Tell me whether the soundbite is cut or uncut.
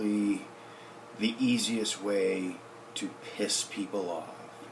uncut